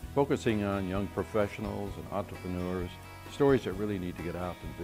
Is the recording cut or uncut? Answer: uncut